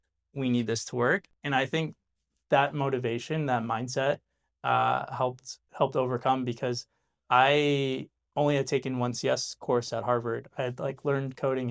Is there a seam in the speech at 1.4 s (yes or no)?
no